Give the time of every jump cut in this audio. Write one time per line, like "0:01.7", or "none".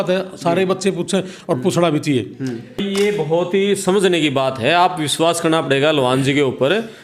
0:02.8